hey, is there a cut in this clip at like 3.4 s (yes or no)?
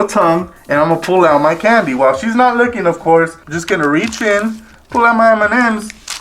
yes